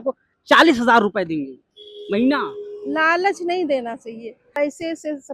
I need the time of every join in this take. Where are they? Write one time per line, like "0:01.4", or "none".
0:04.5